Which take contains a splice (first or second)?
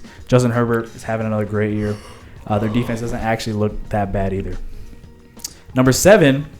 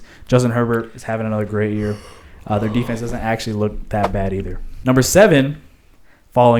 second